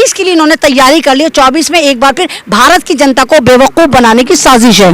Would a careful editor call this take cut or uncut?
uncut